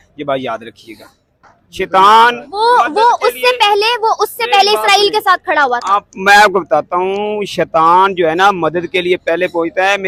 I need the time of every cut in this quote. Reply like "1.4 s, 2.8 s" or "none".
none

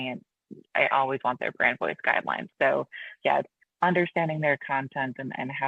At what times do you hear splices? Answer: 2.5 s

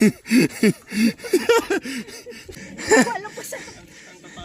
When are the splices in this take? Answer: 2.7 s

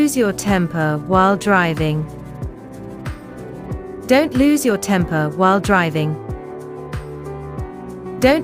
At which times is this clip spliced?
2.5 s, 4.0 s, 6.1 s, 7.5 s

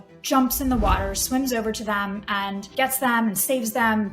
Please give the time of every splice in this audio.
2.7 s

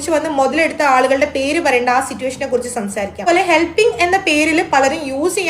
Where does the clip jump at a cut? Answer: 3.3 s

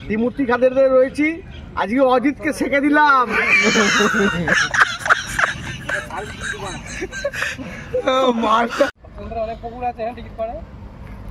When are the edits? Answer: none

